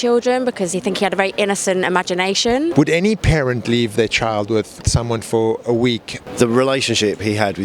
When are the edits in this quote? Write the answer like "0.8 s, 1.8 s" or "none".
2.7 s, 4.8 s, 6.2 s